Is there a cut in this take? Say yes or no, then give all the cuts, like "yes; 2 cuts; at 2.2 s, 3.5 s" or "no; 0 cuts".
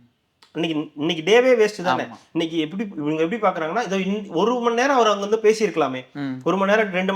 no; 0 cuts